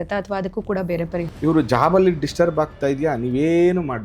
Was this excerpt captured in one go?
no; 1 cut; at 1.2 s

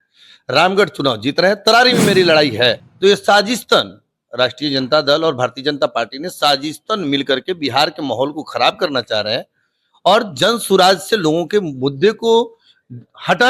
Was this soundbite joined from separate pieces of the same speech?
yes; 1 cut; at 2.9 s

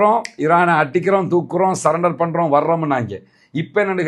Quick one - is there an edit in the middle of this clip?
no; 0 cuts

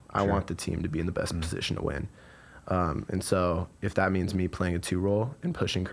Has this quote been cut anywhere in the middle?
no; 0 cuts

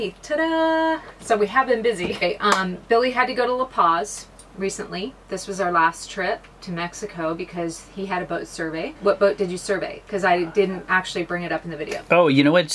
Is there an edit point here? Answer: yes; 2 cuts; at 2.2 s, 8.9 s

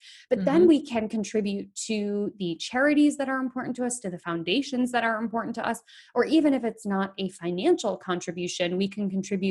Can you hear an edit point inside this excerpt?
no; 0 cuts

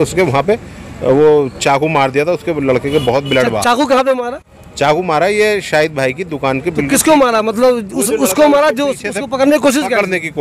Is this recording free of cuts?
yes; 0 cuts

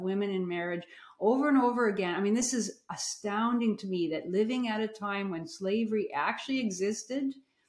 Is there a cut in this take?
no; 0 cuts

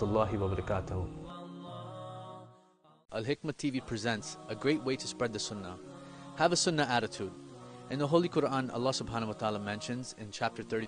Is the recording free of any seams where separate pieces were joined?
yes; 0 cuts

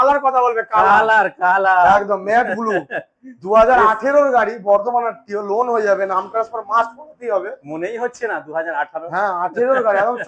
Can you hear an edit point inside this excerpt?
no; 0 cuts

